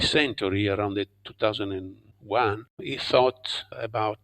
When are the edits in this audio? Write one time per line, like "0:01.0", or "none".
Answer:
0:02.7